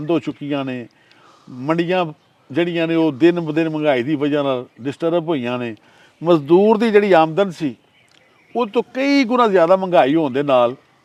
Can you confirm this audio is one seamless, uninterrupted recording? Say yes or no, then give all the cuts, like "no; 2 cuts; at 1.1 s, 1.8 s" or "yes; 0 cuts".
yes; 0 cuts